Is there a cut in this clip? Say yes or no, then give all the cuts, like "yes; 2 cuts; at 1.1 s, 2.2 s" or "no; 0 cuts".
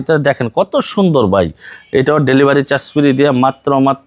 no; 0 cuts